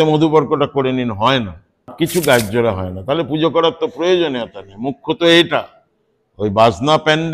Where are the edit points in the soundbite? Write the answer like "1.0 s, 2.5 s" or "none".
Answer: 1.9 s